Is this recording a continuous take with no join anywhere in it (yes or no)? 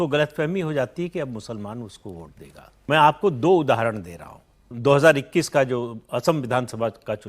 no